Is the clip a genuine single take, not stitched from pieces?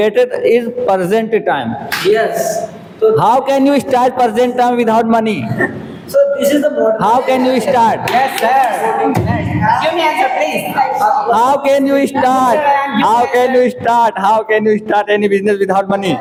yes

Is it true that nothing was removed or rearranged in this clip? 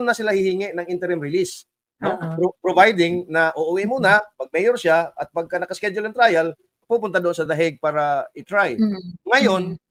yes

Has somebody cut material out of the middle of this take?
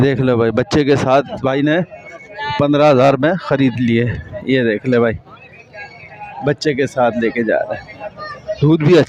no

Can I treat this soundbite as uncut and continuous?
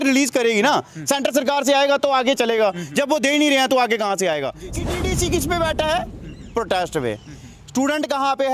no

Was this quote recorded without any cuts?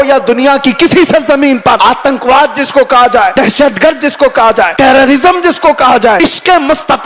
no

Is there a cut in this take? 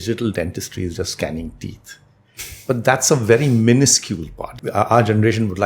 yes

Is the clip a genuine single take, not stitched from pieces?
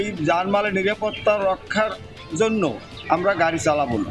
yes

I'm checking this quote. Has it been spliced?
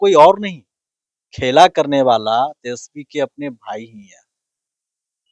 no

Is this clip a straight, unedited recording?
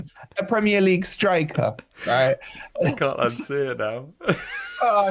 yes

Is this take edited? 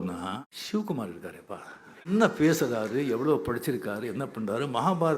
yes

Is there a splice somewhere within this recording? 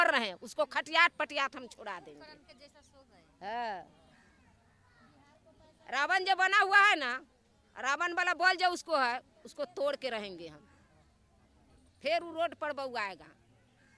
no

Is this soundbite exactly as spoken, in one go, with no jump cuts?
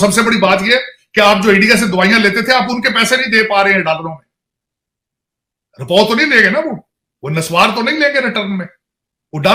yes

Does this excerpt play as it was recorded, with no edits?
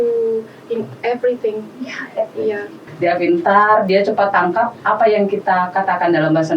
no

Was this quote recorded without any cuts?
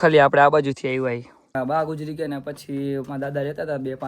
no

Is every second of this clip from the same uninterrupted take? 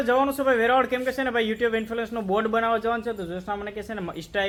yes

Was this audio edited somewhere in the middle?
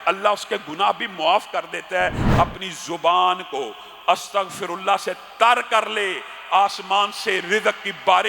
yes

